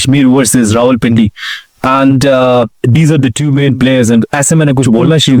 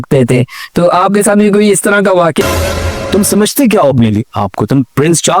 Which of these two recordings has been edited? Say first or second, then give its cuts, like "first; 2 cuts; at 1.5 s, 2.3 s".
second; 1 cut; at 2.4 s